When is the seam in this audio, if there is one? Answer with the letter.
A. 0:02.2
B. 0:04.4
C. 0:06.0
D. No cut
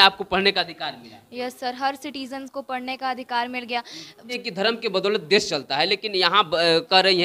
B